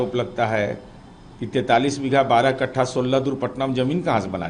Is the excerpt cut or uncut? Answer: uncut